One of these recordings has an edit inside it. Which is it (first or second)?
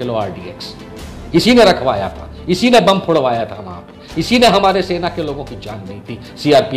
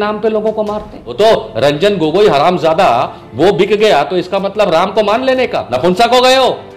second